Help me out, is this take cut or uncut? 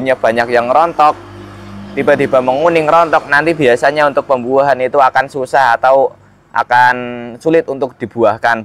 uncut